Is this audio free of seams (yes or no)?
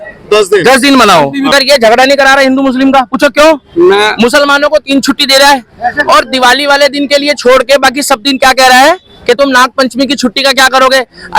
no